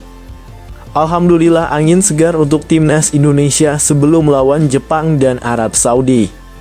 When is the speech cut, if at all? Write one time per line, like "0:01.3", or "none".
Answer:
0:00.9

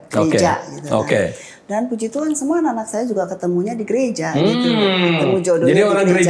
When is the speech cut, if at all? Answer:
none

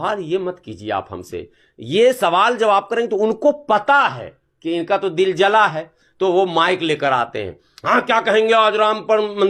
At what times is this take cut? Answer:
none

